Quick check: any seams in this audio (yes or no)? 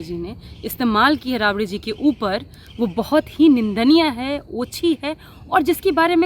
no